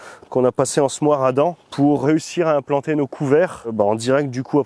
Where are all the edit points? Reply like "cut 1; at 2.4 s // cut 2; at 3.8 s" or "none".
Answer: cut 1; at 2.0 s // cut 2; at 3.7 s